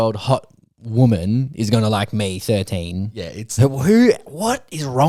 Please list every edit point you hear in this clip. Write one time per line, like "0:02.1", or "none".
none

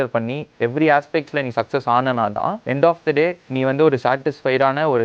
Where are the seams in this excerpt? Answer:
0:02.6
0:03.4

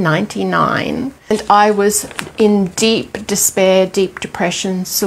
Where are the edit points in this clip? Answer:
0:01.3

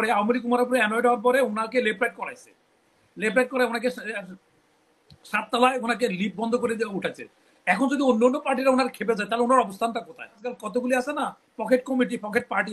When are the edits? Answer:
0:10.5

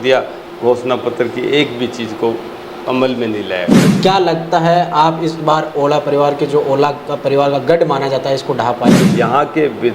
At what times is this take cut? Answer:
0:03.9
0:09.1

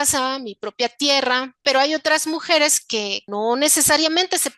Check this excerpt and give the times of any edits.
0:01.6
0:03.2

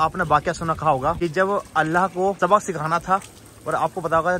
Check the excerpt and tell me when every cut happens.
0:01.2
0:02.4

